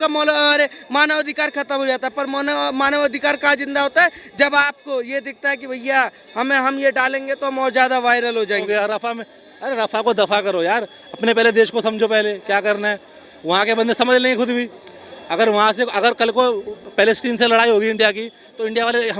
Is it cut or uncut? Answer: cut